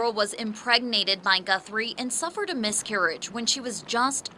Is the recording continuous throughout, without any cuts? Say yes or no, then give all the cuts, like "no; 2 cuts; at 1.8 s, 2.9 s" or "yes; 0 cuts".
yes; 0 cuts